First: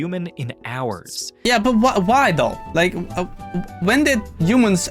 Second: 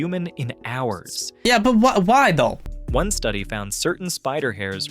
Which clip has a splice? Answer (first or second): second